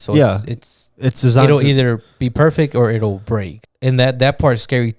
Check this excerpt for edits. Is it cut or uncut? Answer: cut